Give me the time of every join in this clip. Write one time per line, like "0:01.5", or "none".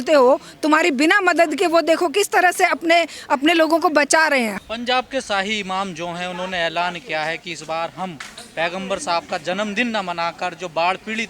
0:04.5